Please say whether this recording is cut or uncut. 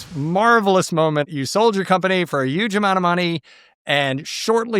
cut